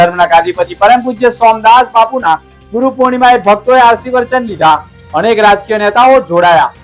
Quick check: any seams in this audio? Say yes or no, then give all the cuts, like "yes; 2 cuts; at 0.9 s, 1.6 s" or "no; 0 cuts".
no; 0 cuts